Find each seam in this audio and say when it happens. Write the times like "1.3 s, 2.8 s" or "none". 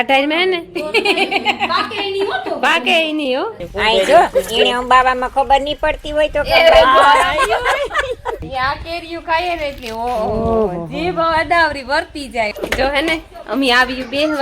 3.6 s, 8.4 s, 12.5 s